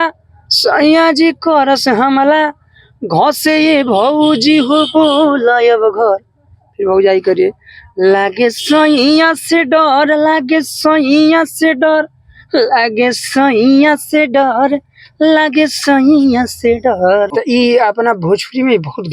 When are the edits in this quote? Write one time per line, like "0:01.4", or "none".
0:17.3